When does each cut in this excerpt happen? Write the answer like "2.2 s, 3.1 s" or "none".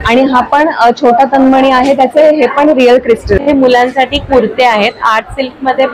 3.4 s